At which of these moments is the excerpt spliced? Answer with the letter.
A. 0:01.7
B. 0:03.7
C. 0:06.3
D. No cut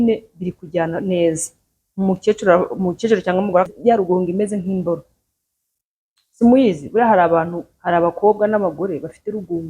B